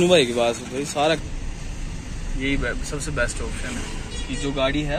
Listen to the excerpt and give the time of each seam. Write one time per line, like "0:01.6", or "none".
0:01.3